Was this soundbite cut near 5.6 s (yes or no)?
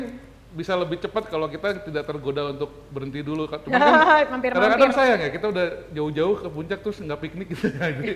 no